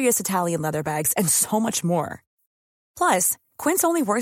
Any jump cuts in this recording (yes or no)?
no